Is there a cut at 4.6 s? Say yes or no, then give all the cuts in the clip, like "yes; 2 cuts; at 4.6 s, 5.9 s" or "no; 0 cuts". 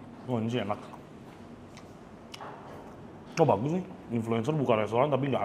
no; 0 cuts